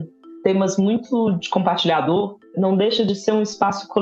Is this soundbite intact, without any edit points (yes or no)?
no